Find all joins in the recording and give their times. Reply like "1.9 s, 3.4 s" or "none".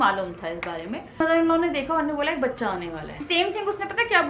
1.2 s, 3.2 s